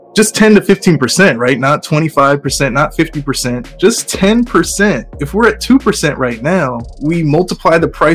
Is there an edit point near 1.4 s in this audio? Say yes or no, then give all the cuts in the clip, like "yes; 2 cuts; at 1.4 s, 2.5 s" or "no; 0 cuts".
no; 3 cuts; at 3.7 s, 5.1 s, 6.9 s